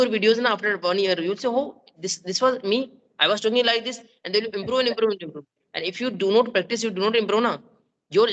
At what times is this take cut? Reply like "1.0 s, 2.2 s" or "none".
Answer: none